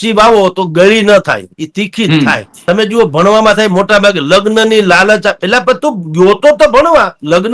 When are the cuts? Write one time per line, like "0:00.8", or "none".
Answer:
0:02.5